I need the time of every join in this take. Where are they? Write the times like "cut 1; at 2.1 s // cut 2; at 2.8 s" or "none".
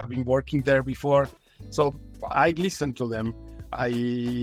none

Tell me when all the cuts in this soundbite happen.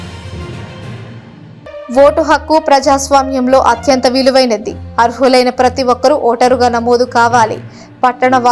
cut 1; at 1.2 s

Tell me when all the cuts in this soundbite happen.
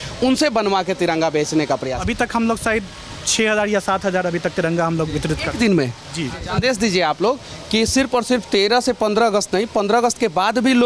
cut 1; at 1.9 s // cut 2; at 6.4 s

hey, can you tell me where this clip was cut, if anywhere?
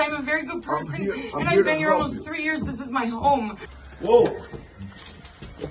cut 1; at 3.9 s

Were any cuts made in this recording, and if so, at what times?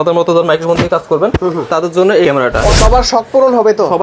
cut 1; at 2.7 s

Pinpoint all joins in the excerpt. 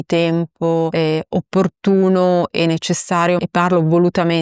cut 1; at 0.9 s // cut 2; at 3.4 s

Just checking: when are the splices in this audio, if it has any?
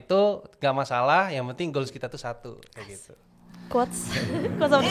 none

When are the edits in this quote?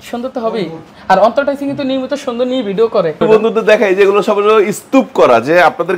cut 1; at 3.2 s

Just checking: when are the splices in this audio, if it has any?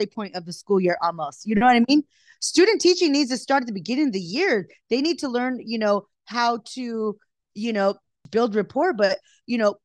cut 1; at 8.1 s

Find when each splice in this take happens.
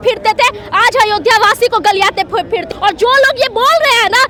none

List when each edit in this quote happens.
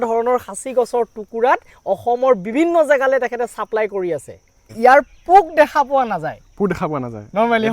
cut 1; at 4.7 s

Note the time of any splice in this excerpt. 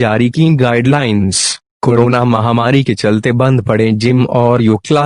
none

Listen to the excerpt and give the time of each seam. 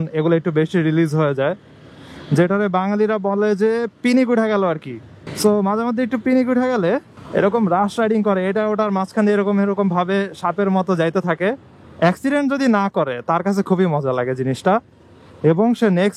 none

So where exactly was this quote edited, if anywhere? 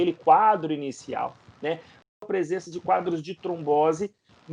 cut 1; at 2.1 s

